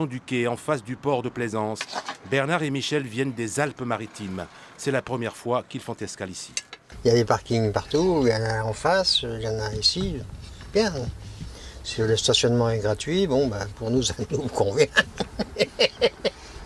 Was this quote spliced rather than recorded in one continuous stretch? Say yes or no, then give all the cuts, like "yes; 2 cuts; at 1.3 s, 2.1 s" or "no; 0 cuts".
yes; 1 cut; at 10.3 s